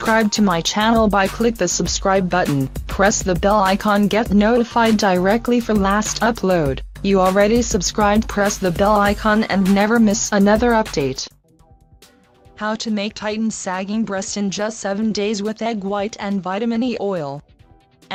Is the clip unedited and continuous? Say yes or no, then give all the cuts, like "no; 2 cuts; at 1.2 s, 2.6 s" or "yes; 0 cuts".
yes; 0 cuts